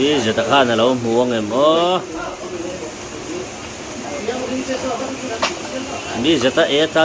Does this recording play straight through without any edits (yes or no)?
yes